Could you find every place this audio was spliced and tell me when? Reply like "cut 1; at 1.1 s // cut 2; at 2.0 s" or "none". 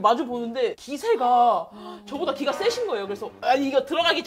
cut 1; at 3.3 s